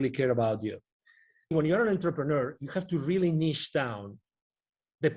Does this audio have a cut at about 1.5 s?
yes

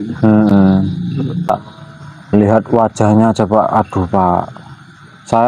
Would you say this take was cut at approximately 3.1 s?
no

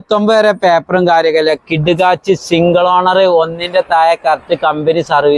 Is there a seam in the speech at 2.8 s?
no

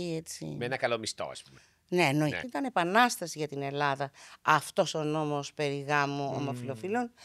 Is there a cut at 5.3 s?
no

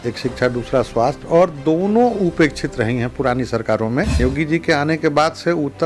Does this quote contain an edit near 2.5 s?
no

